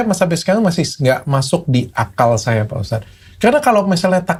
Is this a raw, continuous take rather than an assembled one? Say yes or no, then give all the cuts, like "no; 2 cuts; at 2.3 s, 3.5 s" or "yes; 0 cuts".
yes; 0 cuts